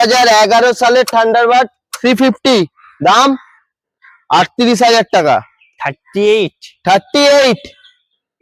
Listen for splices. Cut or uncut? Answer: uncut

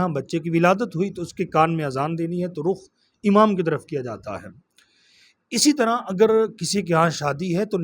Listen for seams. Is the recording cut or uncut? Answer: uncut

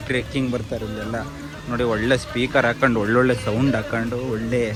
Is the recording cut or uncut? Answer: uncut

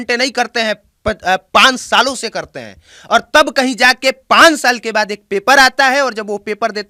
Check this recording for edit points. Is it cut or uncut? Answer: uncut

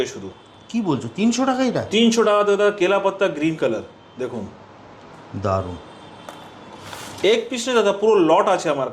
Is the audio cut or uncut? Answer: uncut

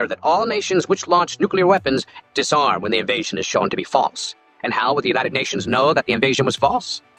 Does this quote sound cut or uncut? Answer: uncut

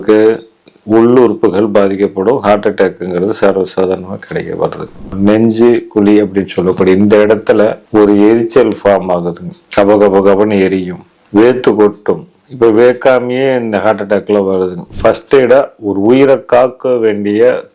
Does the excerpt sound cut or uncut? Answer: cut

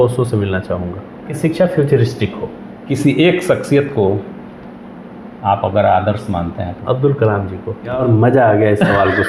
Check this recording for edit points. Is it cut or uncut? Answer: cut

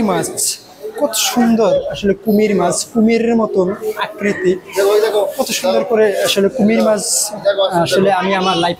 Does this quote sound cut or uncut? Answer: uncut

